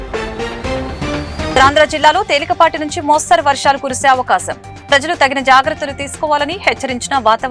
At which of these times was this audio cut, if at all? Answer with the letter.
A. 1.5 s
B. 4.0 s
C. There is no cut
A